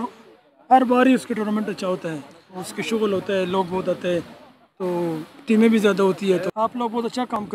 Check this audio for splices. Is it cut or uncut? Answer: cut